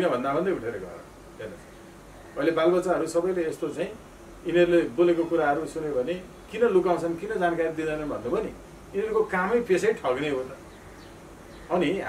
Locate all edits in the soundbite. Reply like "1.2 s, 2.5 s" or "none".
none